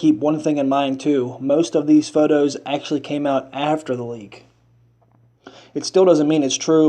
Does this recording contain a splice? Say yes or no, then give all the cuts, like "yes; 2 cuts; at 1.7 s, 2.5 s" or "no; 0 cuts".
yes; 1 cut; at 1.9 s